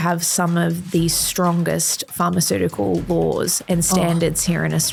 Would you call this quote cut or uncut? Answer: uncut